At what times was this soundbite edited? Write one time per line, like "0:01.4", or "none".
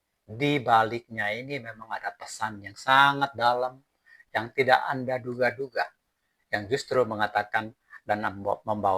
none